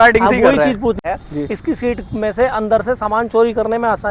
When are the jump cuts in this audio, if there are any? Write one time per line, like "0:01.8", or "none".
0:01.0